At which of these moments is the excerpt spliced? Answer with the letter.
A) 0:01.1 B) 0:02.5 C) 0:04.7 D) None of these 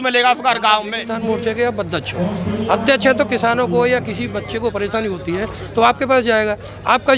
A